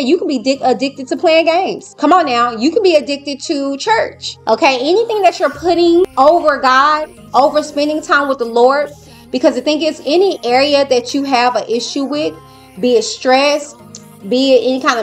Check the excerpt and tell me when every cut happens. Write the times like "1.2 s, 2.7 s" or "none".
1.8 s, 4.3 s, 6.1 s